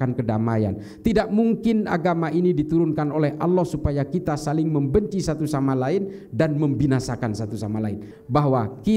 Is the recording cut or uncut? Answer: cut